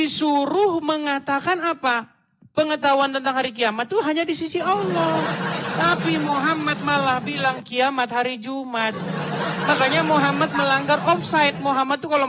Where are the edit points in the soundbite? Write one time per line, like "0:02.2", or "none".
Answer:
none